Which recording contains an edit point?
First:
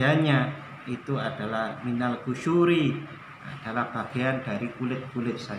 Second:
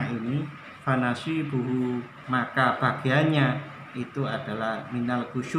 second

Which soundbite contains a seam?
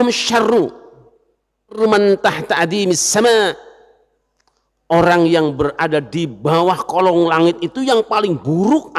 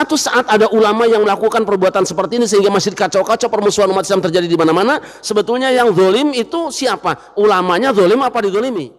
first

